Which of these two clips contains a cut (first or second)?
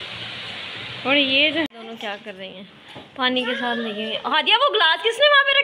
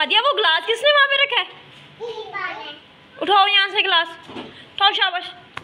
first